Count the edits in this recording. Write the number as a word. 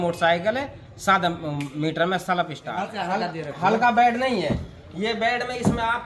one